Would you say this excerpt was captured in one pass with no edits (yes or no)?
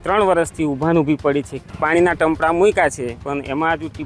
no